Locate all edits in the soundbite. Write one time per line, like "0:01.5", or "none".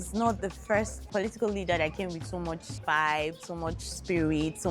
0:01.0
0:02.7